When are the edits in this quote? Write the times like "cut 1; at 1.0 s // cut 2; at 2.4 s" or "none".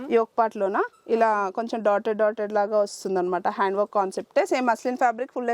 none